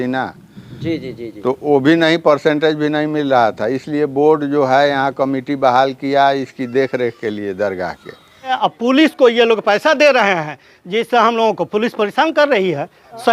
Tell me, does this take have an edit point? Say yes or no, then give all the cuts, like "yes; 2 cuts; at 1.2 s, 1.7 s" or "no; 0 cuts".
yes; 1 cut; at 8.6 s